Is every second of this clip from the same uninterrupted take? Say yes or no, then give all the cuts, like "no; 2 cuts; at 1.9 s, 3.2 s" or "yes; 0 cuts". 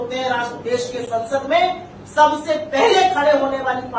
yes; 0 cuts